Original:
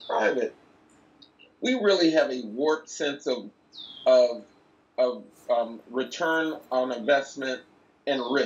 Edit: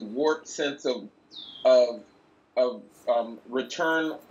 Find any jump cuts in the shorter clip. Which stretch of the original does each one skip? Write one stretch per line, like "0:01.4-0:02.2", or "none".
none